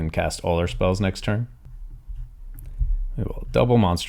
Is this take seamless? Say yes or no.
no